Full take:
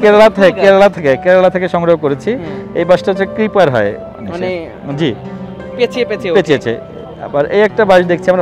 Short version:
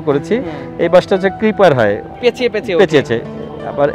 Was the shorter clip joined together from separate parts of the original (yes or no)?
yes